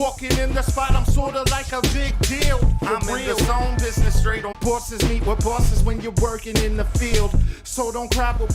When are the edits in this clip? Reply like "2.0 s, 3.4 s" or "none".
4.5 s